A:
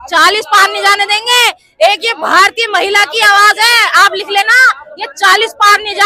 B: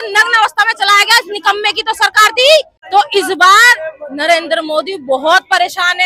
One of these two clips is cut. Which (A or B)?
B